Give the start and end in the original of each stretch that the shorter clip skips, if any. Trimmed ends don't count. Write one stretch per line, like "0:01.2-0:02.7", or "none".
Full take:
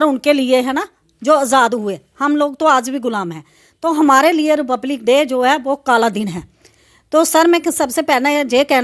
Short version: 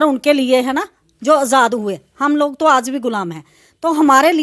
none